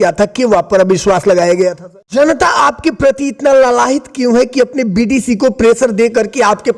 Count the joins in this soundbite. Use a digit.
1